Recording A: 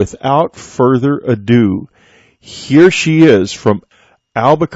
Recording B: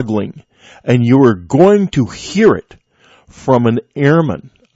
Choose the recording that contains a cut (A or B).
B